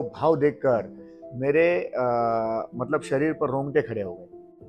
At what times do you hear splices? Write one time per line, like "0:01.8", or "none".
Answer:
none